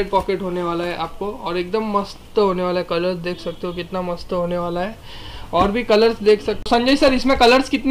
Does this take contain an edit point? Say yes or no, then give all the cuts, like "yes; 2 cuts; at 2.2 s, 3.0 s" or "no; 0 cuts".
no; 0 cuts